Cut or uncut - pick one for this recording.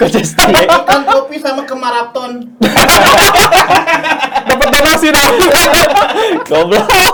uncut